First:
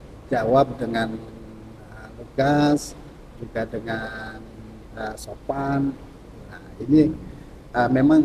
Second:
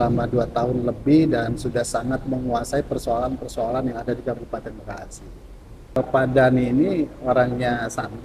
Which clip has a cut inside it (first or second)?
second